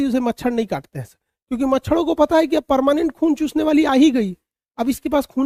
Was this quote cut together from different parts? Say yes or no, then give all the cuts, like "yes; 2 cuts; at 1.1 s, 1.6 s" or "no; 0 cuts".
no; 0 cuts